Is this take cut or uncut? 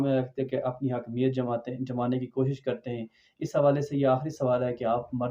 uncut